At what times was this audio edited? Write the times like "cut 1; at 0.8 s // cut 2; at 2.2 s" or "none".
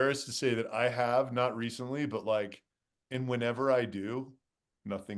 none